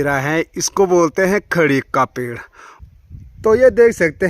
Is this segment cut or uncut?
cut